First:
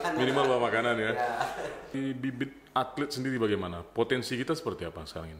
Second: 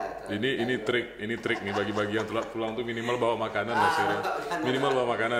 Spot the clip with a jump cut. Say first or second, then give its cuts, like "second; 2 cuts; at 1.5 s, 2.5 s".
first; 1 cut; at 1.9 s